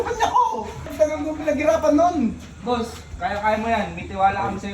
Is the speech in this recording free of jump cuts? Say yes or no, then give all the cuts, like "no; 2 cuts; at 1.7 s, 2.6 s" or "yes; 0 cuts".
no; 1 cut; at 0.9 s